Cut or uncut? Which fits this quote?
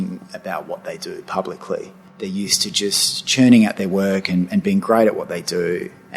cut